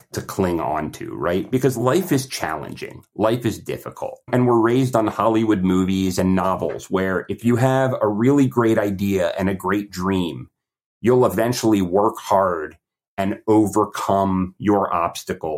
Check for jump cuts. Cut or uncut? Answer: cut